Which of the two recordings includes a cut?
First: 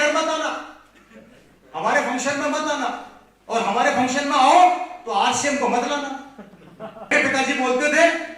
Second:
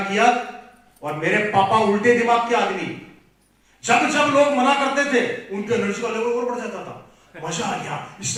first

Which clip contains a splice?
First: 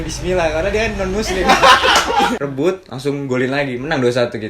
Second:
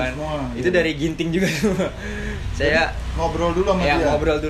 first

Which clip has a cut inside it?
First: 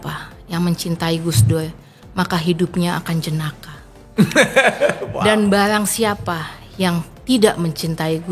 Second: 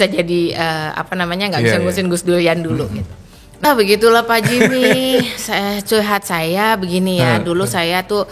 second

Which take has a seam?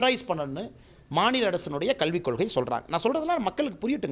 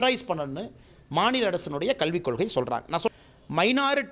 second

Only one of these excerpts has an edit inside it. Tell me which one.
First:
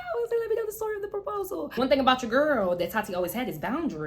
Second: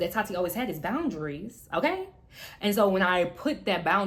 first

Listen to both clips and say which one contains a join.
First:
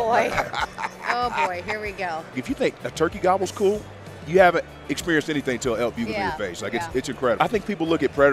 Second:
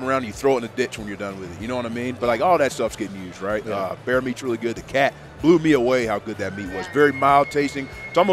first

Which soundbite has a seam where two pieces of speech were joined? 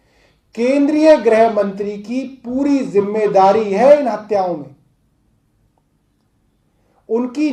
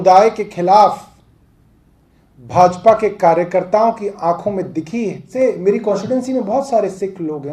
second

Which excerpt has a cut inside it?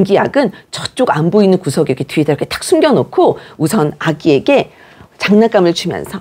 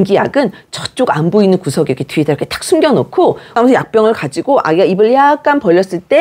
second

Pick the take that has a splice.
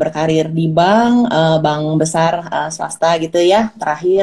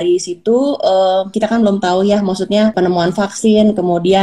second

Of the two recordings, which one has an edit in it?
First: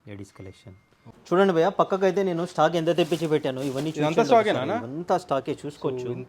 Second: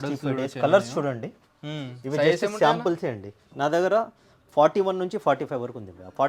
first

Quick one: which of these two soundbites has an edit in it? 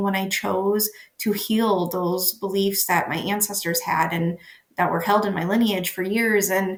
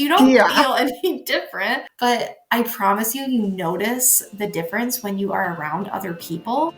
second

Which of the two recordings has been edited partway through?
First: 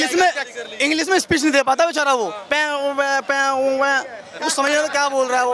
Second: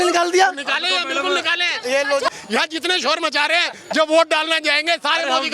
second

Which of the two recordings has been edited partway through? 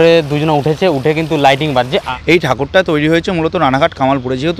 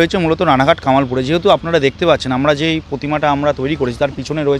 first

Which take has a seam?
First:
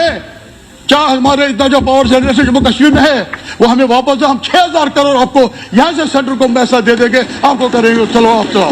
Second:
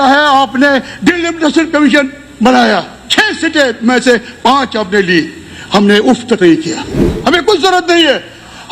second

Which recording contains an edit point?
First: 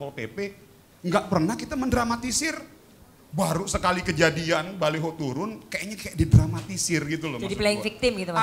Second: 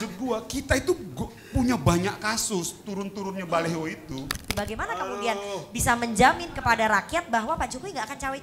second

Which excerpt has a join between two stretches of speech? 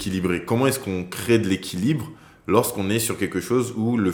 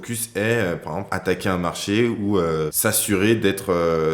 second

